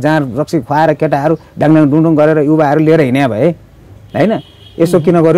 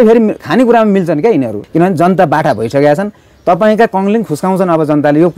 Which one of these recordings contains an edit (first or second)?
second